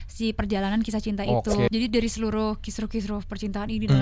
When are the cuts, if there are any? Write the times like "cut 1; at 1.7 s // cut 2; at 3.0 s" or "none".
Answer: cut 1; at 1.7 s